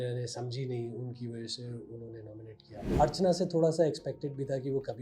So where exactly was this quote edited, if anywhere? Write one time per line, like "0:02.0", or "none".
0:02.9